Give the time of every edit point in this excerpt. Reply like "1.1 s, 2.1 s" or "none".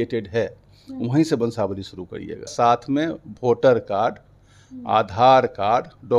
2.5 s